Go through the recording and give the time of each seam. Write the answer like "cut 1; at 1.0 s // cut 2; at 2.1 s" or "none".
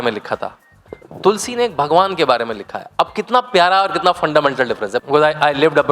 cut 1; at 5.0 s